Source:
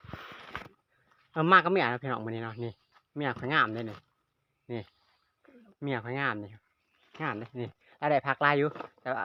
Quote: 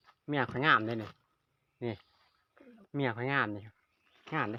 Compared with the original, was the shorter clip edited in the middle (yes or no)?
no